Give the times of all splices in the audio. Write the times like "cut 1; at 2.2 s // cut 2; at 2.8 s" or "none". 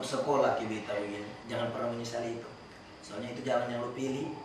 cut 1; at 1.4 s